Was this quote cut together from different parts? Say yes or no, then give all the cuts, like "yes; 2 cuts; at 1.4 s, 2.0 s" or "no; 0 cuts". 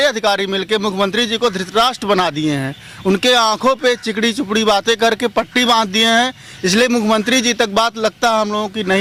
no; 0 cuts